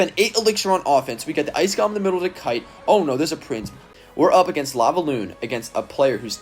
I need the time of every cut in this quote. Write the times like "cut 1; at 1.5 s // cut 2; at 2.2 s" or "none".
cut 1; at 3.8 s